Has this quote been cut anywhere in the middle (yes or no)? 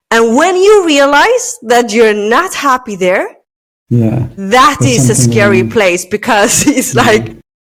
no